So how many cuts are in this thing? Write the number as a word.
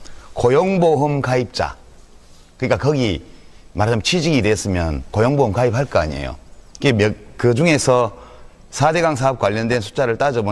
one